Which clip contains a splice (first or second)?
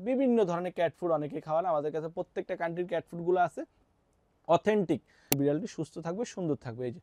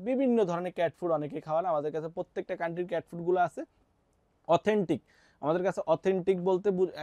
first